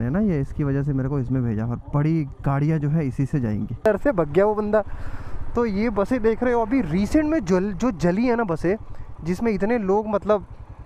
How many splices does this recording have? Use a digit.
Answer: 1